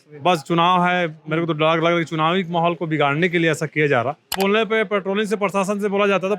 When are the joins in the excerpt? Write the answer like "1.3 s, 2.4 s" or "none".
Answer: 4.4 s